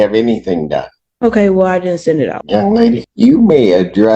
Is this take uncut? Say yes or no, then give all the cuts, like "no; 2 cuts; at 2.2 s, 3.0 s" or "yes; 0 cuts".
no; 2 cuts; at 2.4 s, 3.1 s